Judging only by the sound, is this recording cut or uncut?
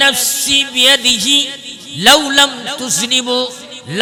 uncut